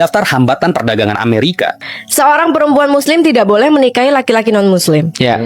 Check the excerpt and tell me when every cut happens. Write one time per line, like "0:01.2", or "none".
0:01.8